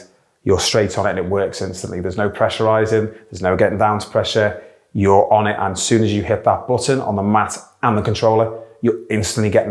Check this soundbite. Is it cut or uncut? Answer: uncut